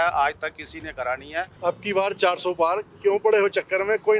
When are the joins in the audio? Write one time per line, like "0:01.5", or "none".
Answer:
0:01.5